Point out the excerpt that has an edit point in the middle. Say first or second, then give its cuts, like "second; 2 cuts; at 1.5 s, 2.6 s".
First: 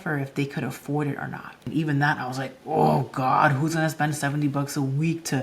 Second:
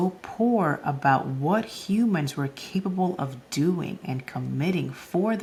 first; 1 cut; at 1.6 s